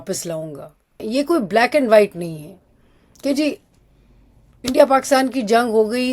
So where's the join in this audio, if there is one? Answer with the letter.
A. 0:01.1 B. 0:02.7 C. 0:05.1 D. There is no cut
A